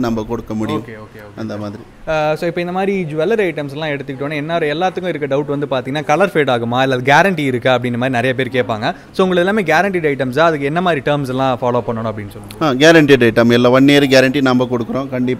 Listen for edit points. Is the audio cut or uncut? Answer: uncut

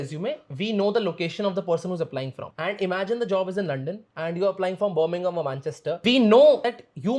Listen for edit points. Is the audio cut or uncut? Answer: uncut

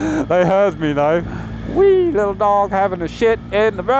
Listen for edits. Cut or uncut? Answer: cut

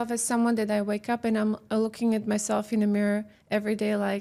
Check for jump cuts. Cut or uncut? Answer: uncut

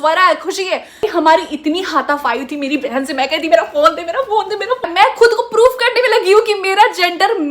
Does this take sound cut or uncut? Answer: cut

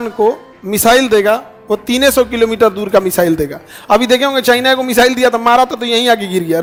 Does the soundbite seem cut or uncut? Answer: uncut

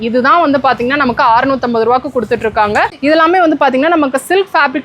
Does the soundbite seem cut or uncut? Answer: cut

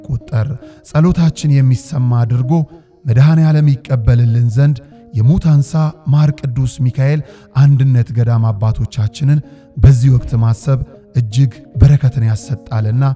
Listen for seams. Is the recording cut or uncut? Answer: uncut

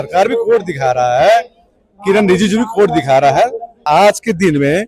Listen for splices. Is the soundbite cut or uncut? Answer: cut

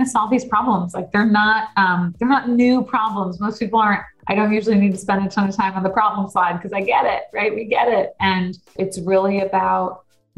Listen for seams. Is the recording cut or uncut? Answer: cut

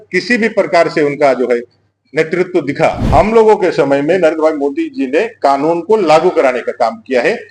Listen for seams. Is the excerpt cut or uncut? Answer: cut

